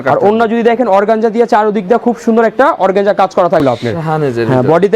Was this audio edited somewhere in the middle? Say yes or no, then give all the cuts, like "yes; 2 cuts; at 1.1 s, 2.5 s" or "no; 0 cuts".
yes; 1 cut; at 3.6 s